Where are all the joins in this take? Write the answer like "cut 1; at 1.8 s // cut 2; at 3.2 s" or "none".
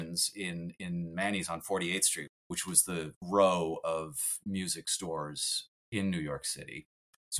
none